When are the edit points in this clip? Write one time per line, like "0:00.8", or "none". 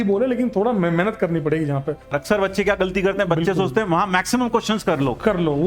0:02.2